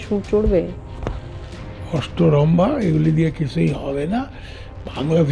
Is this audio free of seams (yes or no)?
yes